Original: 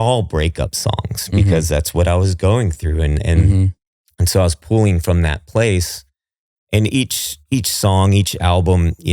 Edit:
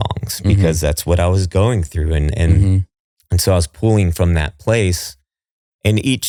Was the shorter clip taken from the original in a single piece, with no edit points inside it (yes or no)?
yes